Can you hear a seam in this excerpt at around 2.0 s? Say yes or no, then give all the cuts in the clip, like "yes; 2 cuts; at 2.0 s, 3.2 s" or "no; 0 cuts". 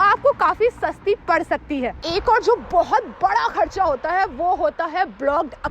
yes; 1 cut; at 2.0 s